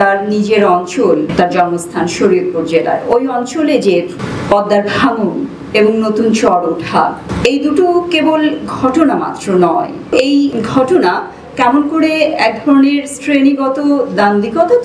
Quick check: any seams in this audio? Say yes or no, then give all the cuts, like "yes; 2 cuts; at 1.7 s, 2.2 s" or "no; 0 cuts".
yes; 4 cuts; at 1.3 s, 4.2 s, 7.3 s, 10.3 s